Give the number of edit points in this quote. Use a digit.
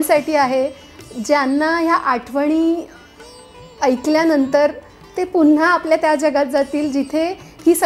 0